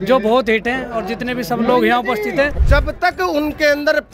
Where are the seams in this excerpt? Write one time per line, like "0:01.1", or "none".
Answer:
0:02.6